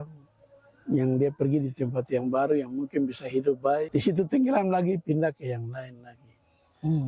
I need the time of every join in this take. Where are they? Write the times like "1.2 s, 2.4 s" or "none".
3.9 s